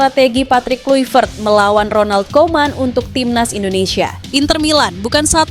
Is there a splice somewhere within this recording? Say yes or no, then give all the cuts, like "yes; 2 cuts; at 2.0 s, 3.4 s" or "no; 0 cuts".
yes; 1 cut; at 4.2 s